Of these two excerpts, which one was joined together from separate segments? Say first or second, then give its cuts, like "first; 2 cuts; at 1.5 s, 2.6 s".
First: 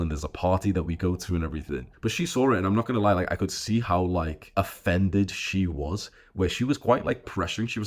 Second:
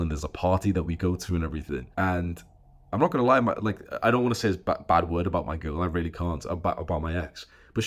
first; 1 cut; at 1.9 s